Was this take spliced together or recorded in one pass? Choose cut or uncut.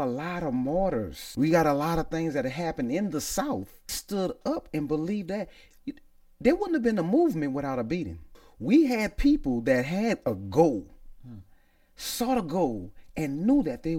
cut